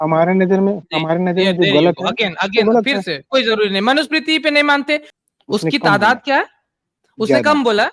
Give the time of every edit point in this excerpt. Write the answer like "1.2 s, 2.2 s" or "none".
5.2 s